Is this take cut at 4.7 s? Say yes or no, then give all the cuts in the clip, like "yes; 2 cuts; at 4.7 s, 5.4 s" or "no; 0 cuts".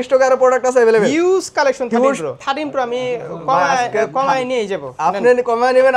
no; 1 cut; at 2.3 s